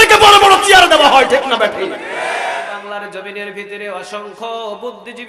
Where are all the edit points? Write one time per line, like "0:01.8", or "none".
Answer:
0:02.7